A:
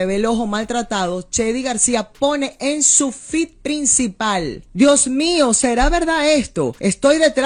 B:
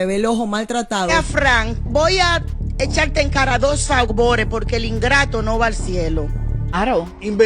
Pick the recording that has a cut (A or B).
B